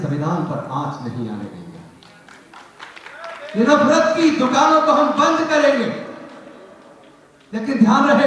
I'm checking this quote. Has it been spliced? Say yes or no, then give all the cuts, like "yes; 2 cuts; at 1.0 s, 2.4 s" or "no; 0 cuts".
no; 0 cuts